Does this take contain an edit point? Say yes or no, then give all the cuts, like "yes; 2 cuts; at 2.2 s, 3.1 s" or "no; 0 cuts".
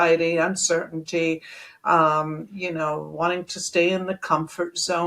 no; 0 cuts